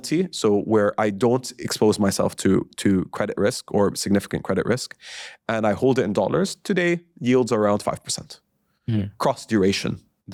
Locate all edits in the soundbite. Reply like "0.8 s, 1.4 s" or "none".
none